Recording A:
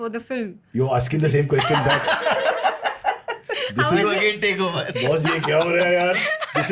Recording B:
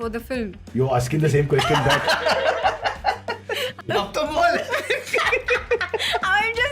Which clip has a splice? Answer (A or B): B